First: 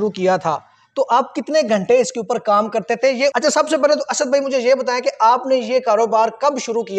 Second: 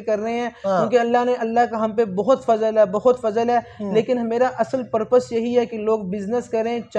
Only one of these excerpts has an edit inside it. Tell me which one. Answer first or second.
first